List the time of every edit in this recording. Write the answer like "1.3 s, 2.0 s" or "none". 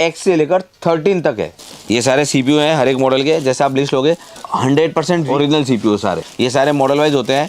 1.7 s, 4.3 s, 5.3 s, 6.3 s